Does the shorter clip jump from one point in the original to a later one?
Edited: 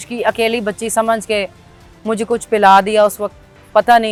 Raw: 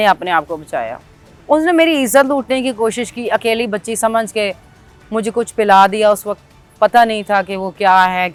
no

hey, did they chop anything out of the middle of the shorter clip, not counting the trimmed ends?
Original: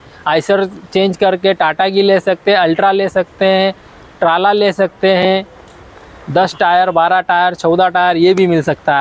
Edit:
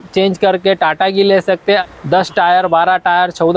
yes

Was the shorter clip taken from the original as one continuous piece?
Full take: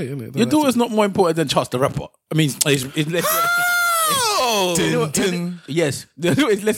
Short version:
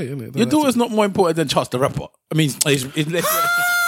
yes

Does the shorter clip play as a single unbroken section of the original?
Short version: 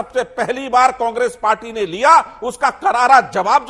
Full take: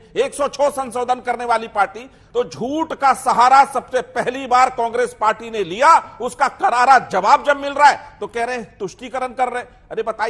yes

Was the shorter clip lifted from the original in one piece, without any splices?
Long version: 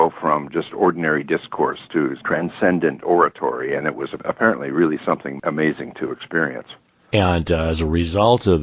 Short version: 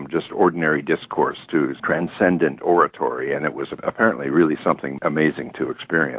yes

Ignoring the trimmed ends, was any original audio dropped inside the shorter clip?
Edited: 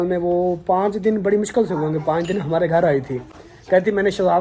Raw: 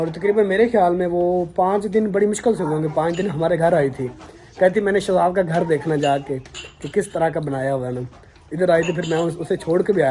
no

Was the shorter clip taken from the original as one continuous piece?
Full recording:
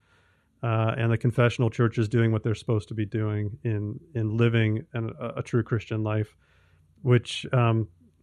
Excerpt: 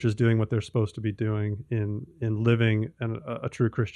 yes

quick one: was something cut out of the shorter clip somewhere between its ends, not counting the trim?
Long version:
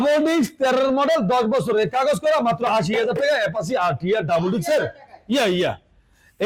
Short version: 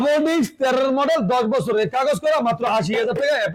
no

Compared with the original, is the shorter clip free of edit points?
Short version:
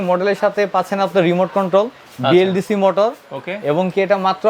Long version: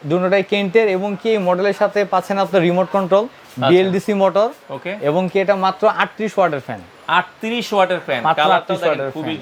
yes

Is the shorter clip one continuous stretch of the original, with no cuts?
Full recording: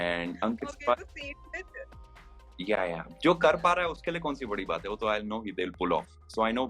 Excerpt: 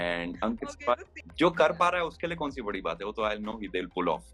no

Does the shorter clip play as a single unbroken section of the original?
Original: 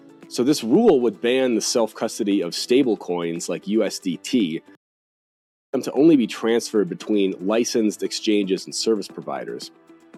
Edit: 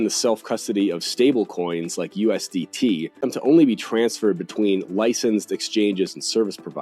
no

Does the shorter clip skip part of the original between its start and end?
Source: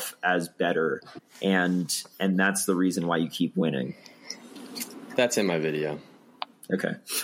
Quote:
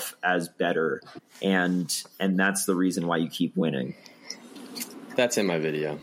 no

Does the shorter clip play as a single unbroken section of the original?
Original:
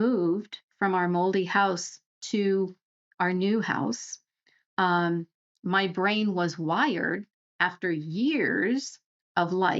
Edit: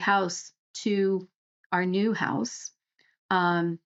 yes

